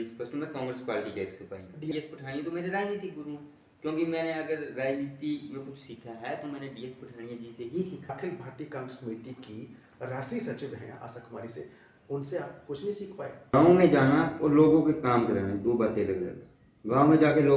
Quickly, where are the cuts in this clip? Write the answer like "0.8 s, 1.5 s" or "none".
1.9 s, 8.1 s, 13.5 s